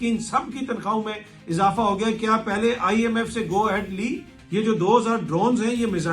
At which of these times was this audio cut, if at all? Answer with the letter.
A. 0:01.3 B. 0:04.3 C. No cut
B